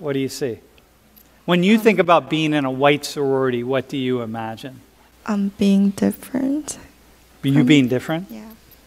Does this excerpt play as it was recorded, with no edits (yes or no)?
yes